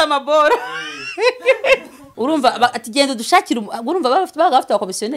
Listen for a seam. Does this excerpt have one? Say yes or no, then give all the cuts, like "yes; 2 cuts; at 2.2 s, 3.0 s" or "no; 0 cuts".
yes; 1 cut; at 2.0 s